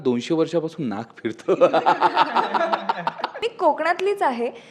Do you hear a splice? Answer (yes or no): yes